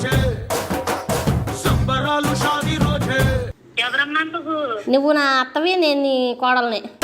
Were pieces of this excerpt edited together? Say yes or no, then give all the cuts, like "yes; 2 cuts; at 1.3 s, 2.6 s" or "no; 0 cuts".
yes; 1 cut; at 3.6 s